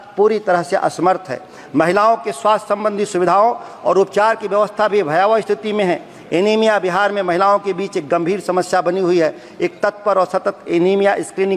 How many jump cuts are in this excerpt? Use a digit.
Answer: 0